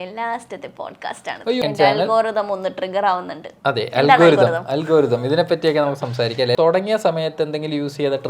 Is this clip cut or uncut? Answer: cut